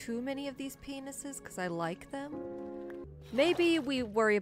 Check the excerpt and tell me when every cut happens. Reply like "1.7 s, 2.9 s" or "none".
3.1 s